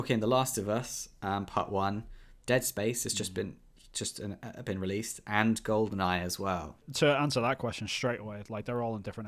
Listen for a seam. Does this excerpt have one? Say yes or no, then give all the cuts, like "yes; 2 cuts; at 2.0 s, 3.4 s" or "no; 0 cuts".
yes; 1 cut; at 6.9 s